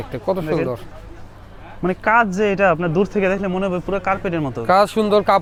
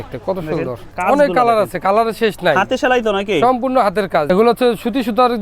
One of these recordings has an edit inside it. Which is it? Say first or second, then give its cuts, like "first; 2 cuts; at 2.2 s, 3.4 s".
second; 2 cuts; at 0.9 s, 4.3 s